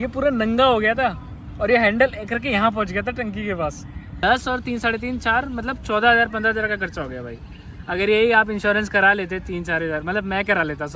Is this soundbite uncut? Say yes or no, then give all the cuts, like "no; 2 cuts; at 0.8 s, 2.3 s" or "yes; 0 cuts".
no; 1 cut; at 4.1 s